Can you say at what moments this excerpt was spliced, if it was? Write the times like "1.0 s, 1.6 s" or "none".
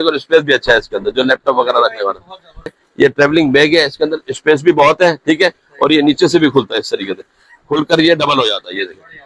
2.8 s